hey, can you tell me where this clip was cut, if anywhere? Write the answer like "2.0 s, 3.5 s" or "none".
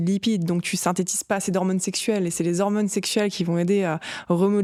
none